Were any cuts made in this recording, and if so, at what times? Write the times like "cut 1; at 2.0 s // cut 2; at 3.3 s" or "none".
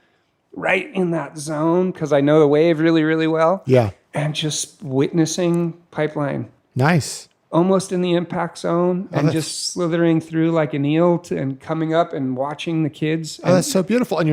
none